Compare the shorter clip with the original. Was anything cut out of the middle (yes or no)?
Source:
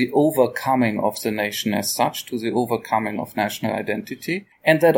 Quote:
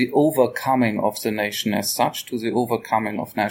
no